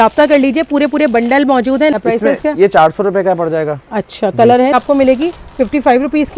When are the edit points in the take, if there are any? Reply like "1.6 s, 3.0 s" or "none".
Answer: 1.9 s, 4.7 s